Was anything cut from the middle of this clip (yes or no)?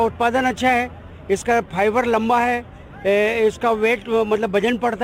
no